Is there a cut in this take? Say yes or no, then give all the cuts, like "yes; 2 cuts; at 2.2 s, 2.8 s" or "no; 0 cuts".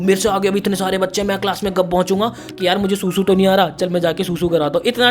yes; 1 cut; at 2.4 s